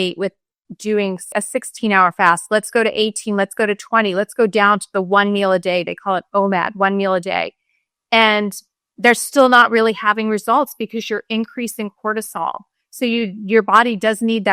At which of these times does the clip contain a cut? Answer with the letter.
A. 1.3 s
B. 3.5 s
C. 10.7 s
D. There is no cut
A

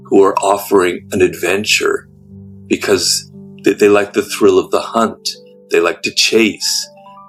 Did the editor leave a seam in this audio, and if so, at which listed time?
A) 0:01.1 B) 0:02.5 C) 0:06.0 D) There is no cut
D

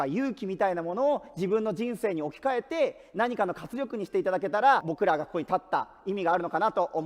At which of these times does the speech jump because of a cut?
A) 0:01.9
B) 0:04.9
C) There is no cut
B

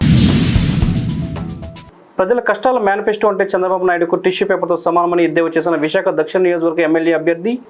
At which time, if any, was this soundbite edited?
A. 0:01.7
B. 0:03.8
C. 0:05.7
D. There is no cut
A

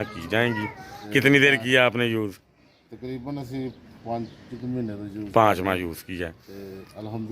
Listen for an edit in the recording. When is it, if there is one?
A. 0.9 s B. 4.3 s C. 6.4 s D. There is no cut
A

